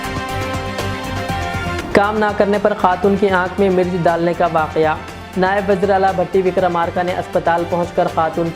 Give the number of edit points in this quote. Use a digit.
1